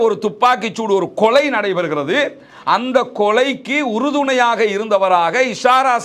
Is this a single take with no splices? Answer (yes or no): yes